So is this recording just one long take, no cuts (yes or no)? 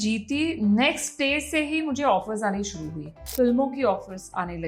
no